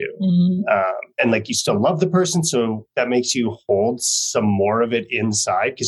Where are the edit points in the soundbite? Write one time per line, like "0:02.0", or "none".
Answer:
none